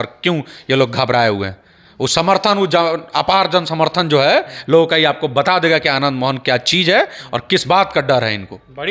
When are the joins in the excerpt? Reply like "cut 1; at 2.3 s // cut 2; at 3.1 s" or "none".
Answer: none